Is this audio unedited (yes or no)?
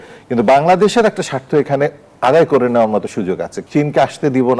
no